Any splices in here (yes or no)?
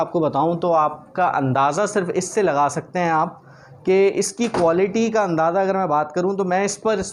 no